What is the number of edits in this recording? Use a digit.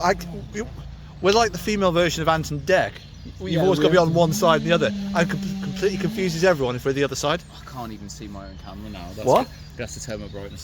0